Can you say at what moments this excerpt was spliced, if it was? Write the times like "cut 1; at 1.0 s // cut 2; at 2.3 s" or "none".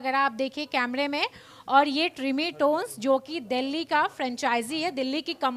none